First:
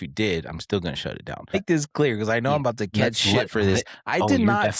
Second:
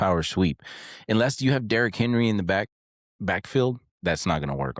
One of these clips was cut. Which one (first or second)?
first